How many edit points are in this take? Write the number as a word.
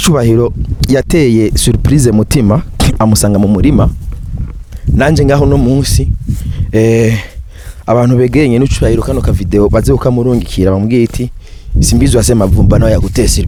zero